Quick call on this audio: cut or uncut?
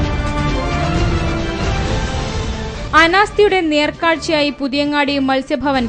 cut